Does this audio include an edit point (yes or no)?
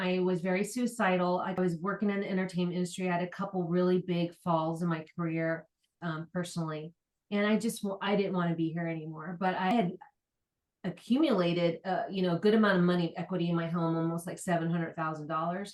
no